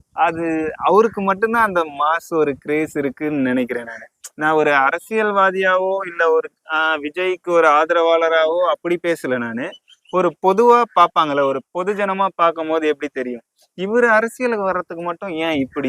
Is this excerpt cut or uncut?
uncut